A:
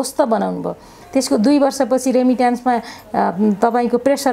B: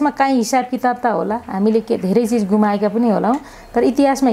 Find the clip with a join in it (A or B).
A